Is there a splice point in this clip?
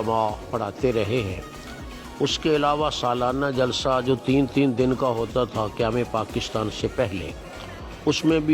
no; 0 cuts

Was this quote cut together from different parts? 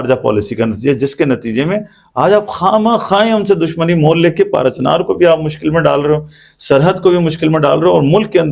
no; 0 cuts

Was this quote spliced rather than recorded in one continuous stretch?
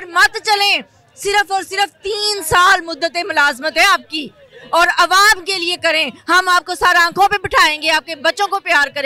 no; 0 cuts

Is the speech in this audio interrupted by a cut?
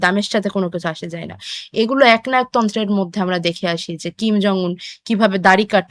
no; 0 cuts

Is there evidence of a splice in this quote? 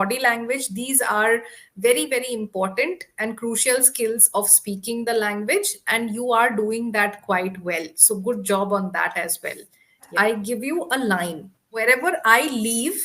yes; 2 cuts; at 10.1 s, 11.8 s

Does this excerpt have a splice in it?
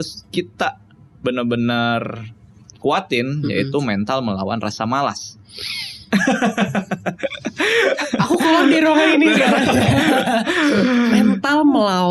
no; 0 cuts

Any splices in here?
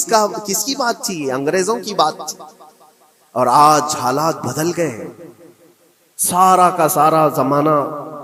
no; 0 cuts

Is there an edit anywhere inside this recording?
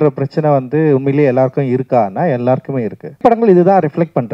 yes; 1 cut; at 3.2 s

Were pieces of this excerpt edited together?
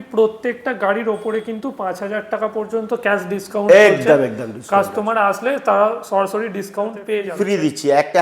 yes; 1 cut; at 7.1 s

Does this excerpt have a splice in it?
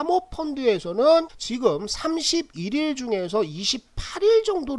yes; 1 cut; at 1.4 s

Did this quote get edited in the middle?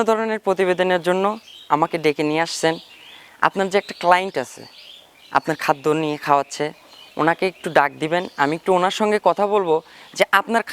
no; 0 cuts

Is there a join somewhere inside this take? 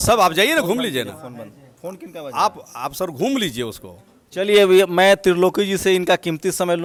no; 0 cuts

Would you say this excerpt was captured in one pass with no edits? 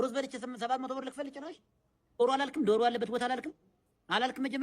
no; 1 cut; at 2.2 s

